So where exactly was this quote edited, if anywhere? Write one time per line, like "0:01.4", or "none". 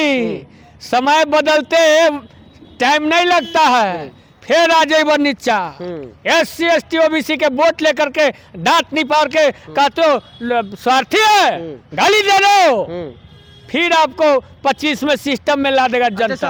none